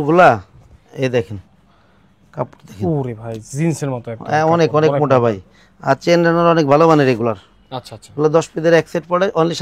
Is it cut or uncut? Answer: uncut